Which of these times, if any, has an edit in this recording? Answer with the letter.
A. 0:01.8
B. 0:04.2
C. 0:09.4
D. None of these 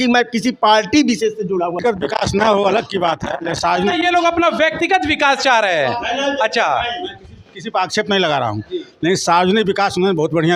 A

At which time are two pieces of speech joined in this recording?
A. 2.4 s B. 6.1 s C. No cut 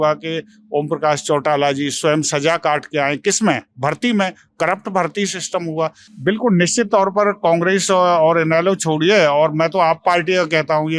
B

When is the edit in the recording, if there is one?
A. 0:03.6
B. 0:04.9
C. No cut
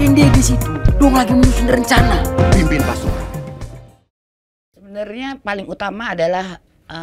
B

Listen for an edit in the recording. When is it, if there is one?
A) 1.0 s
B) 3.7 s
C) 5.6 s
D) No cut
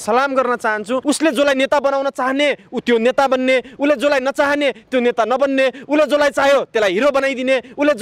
A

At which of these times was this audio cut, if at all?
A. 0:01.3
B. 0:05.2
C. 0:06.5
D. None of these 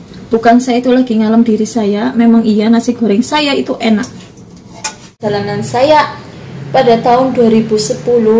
B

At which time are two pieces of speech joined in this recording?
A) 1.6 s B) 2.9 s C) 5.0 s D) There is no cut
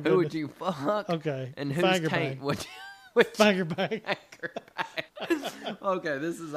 C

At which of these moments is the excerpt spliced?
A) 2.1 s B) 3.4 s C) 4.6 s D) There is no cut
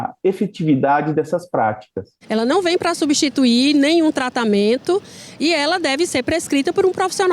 A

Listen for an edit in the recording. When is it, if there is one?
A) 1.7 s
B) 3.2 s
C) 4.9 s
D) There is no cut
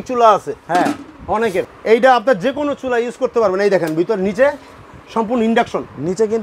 A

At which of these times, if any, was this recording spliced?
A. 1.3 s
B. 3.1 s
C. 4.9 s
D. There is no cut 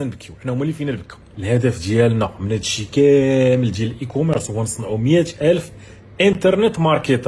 A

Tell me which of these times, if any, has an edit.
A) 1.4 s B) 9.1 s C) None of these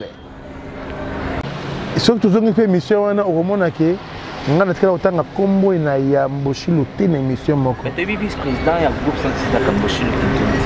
A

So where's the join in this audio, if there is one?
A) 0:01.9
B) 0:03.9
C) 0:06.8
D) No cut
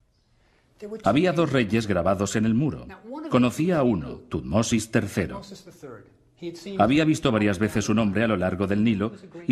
C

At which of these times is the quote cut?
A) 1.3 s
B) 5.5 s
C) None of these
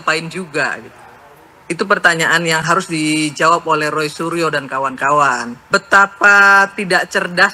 B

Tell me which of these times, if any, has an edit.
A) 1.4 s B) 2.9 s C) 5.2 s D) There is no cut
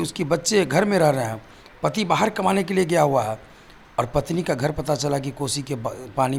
D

